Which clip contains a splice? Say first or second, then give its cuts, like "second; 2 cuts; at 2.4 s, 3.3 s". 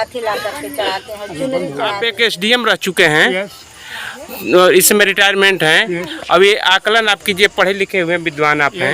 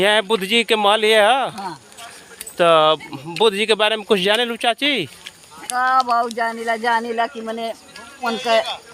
first; 1 cut; at 2.1 s